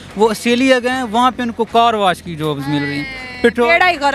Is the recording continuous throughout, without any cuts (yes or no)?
no